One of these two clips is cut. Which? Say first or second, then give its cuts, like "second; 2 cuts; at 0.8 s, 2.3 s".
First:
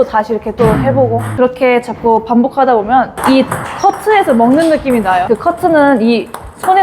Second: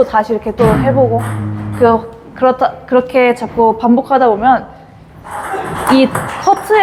first; 3 cuts; at 1.3 s, 3.1 s, 5.2 s